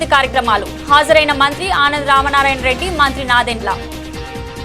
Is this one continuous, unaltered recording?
no; 1 cut; at 3.8 s

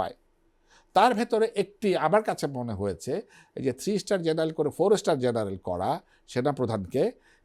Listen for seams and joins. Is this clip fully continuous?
yes; 0 cuts

